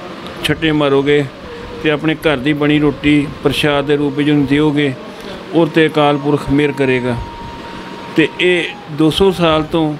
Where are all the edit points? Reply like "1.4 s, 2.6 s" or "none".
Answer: none